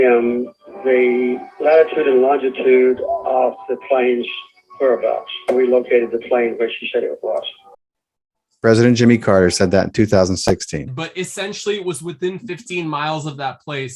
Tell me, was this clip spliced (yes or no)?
yes